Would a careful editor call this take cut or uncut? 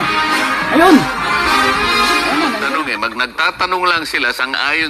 cut